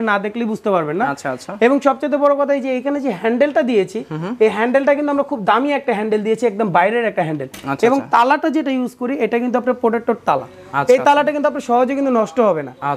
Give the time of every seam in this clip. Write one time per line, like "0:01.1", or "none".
none